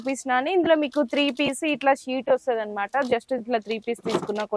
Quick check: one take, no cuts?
yes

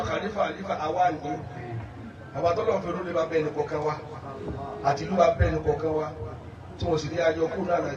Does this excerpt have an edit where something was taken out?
no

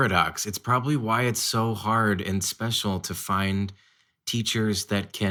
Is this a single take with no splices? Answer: yes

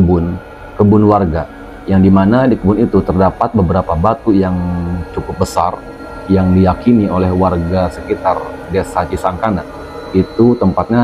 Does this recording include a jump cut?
no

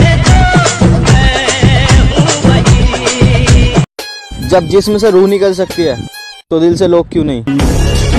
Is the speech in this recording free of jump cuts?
no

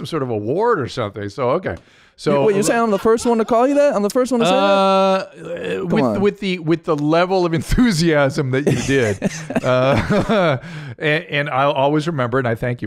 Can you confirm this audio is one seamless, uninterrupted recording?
yes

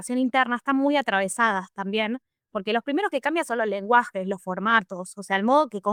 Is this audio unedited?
yes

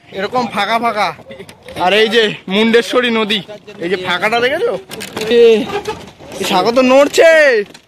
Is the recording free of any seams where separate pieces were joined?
no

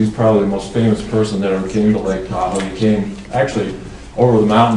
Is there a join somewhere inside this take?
no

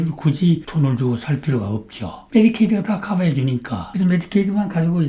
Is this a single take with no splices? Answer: no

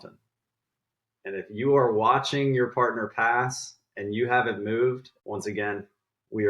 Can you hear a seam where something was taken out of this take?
yes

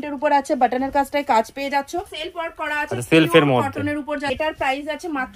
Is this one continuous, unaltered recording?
no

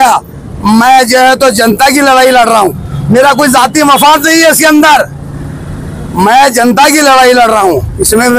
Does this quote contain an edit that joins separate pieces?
no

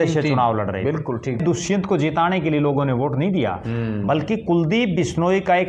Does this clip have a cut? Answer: yes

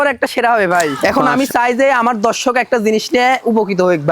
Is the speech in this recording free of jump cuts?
no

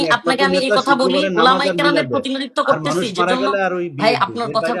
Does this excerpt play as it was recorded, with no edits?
yes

